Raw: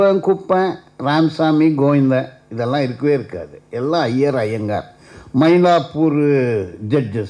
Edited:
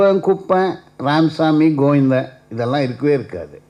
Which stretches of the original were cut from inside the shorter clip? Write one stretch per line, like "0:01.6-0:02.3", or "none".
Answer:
none